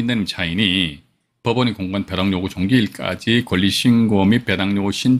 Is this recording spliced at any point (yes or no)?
no